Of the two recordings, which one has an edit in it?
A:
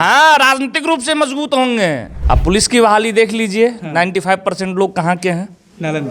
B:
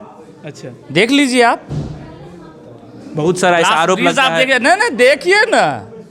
A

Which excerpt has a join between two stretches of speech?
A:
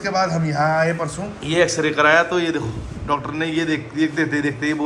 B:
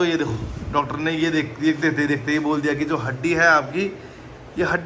A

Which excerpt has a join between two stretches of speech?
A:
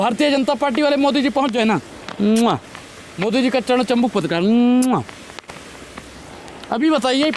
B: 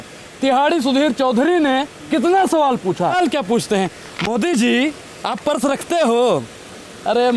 B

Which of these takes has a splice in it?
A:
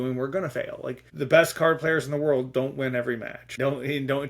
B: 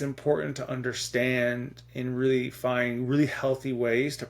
A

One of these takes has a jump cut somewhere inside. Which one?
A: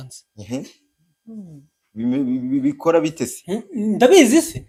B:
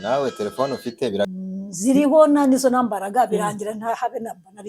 B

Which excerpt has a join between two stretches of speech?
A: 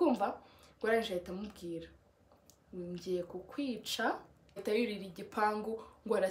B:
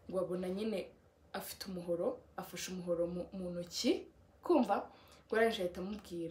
A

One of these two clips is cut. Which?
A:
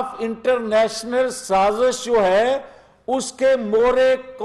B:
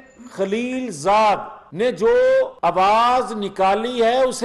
B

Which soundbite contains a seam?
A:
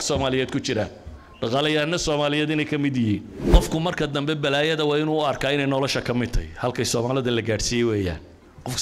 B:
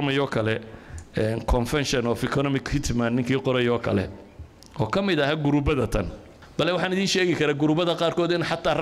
A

